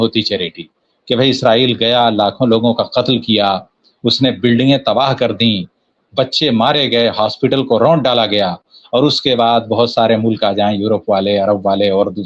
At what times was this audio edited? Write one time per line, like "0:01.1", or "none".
none